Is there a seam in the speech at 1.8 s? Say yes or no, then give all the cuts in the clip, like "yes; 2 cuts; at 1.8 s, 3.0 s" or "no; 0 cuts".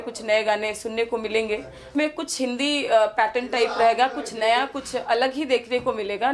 yes; 1 cut; at 1.8 s